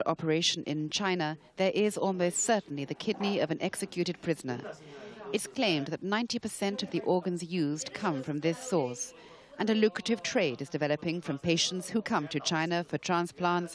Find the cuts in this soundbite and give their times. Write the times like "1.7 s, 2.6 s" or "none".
3.6 s